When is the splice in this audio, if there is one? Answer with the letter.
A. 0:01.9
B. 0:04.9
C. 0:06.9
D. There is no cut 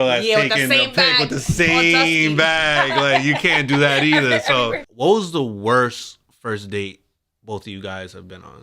B